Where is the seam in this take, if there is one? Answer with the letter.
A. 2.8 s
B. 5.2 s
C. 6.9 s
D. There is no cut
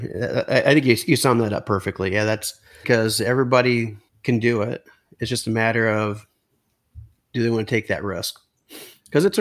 A